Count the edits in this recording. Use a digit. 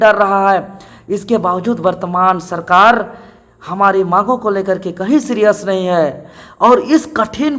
0